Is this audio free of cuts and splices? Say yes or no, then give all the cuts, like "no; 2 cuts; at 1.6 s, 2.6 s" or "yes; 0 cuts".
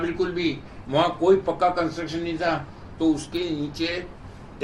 yes; 0 cuts